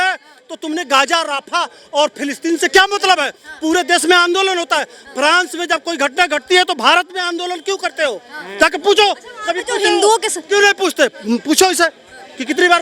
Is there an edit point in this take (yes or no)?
no